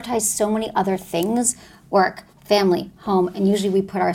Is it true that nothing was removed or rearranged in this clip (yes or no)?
yes